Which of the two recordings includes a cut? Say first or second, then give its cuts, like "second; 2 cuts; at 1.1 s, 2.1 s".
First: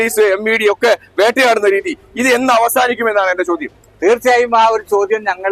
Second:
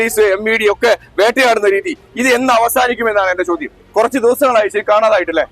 second; 1 cut; at 3.8 s